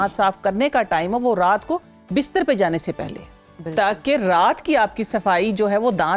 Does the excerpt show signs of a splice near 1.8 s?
no; 0 cuts

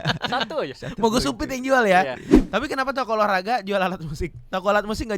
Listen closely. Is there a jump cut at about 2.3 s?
yes; 1 cut; at 2.3 s

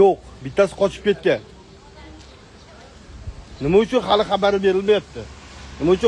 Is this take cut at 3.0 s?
yes; 1 cut; at 3.0 s

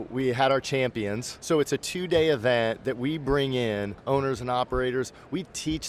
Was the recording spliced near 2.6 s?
no; 2 cuts; at 1.3 s, 3.9 s

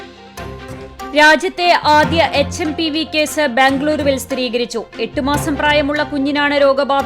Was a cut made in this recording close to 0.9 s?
yes; 1 cut; at 0.9 s

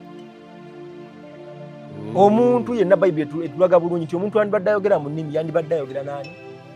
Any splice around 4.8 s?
no; 1 cut; at 1.9 s

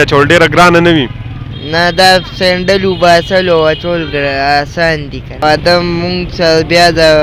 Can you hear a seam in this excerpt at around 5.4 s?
yes; 1 cut; at 5.4 s

